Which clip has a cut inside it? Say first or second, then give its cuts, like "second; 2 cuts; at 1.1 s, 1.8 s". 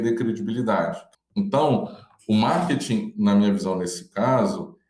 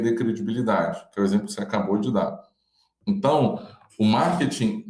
first; 1 cut; at 1.0 s